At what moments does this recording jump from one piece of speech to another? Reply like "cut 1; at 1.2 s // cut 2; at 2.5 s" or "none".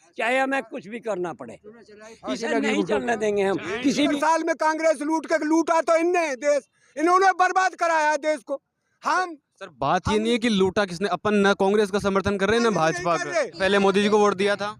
cut 1; at 4.1 s // cut 2; at 13.6 s

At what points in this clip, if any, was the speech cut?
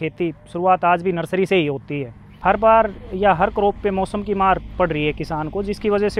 cut 1; at 2.3 s

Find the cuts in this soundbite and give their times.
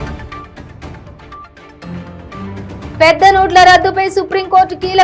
cut 1; at 1.2 s

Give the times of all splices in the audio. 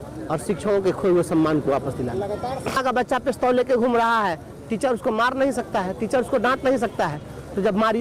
cut 1; at 2.8 s

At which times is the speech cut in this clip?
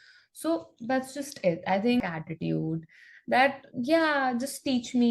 cut 1; at 2.0 s

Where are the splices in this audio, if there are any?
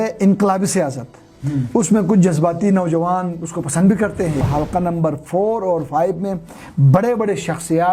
cut 1; at 4.4 s

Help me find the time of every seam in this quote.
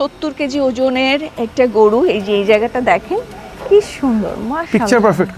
none

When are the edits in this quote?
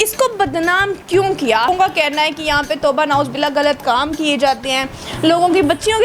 cut 1; at 1.7 s

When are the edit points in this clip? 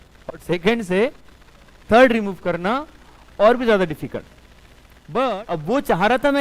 cut 1; at 5.3 s

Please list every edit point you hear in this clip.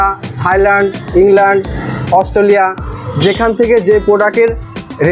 none

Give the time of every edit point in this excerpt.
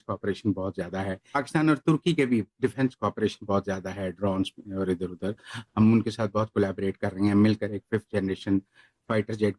none

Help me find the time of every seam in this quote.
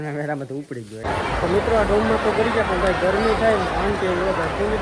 cut 1; at 1.2 s

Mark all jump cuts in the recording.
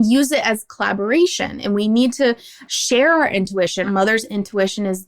cut 1; at 3.9 s

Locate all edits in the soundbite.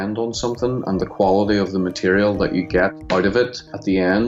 cut 1; at 3.4 s

